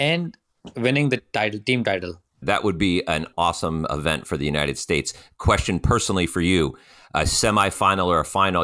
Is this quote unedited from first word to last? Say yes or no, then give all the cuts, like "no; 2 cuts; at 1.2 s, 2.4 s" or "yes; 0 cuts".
no; 1 cut; at 2.4 s